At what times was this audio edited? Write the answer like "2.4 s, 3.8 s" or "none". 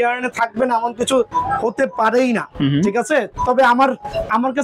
none